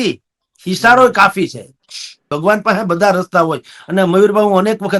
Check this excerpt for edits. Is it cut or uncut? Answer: cut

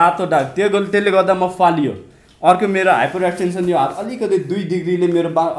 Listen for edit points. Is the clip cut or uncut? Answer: uncut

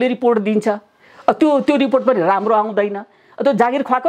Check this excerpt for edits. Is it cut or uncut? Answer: uncut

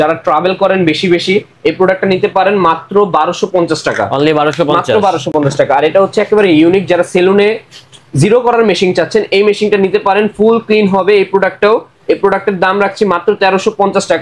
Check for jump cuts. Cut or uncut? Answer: uncut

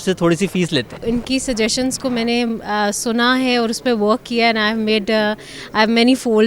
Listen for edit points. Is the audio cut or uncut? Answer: cut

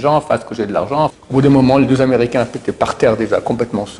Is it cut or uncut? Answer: cut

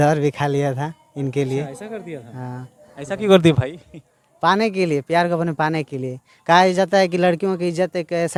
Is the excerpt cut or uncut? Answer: uncut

